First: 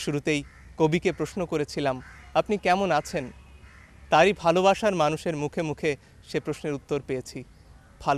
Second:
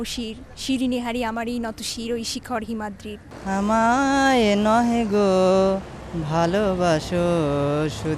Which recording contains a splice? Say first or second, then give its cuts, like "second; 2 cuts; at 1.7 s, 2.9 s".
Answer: second; 1 cut; at 3.3 s